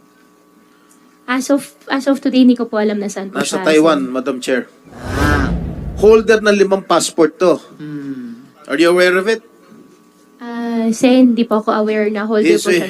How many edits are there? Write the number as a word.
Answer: one